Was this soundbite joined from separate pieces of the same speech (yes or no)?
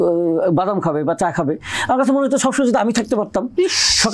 no